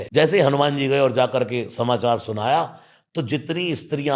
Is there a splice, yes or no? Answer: no